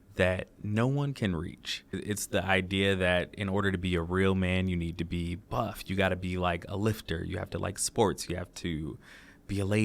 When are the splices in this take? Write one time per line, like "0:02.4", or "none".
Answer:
0:02.0